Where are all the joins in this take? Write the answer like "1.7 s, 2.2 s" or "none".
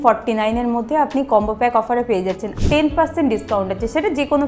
2.5 s